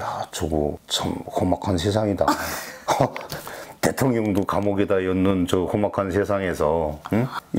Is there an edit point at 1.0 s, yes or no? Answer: no